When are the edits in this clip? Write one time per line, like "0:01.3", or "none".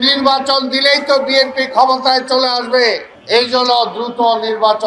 0:03.1